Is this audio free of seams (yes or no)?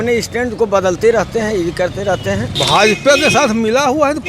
no